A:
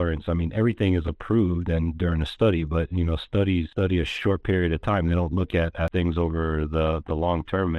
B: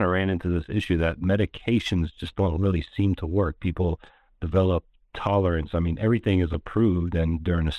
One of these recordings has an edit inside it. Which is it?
A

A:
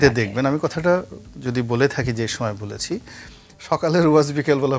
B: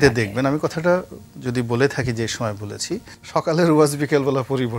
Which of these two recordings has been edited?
B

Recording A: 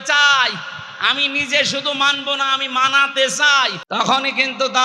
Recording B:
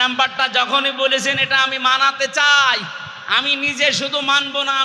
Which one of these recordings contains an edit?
A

